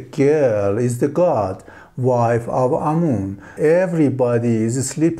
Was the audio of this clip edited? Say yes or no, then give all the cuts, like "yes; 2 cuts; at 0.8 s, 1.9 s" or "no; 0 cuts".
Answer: yes; 1 cut; at 3.5 s